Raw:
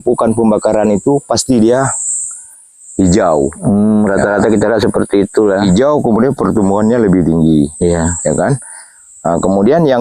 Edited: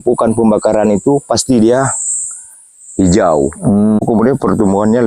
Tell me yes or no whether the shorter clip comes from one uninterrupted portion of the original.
no